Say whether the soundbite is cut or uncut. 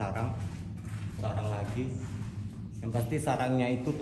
uncut